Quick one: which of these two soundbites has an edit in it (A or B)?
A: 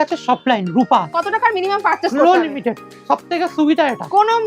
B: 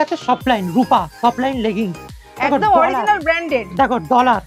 A